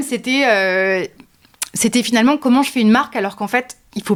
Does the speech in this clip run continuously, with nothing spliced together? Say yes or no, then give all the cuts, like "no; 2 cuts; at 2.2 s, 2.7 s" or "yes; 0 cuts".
yes; 0 cuts